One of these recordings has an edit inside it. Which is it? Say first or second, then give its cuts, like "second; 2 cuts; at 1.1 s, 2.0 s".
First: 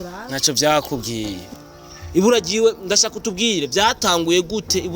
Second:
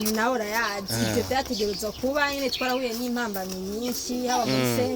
first; 1 cut; at 1.5 s